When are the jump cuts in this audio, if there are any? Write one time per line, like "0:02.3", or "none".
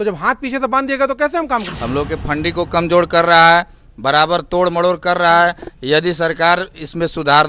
0:01.7